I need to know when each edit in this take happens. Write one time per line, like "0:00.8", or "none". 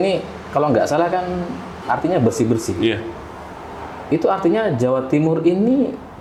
none